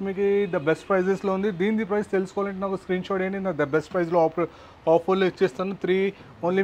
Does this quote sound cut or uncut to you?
uncut